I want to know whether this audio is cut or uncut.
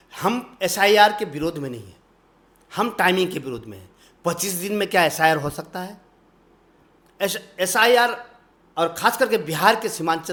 uncut